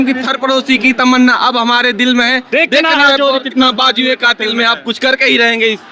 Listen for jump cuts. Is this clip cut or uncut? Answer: uncut